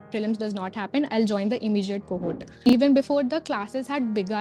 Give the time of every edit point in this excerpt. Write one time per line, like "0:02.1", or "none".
0:02.6